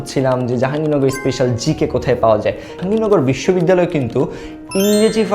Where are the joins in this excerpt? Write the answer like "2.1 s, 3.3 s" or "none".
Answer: 2.8 s